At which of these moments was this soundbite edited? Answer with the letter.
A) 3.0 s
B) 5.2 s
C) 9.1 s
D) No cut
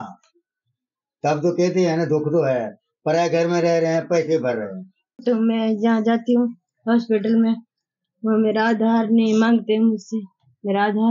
B